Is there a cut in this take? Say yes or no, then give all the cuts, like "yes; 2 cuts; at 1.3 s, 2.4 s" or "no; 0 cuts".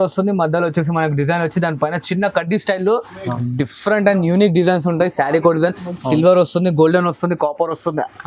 yes; 1 cut; at 3.3 s